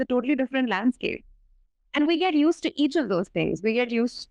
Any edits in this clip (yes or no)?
no